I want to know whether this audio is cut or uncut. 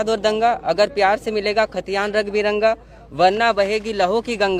uncut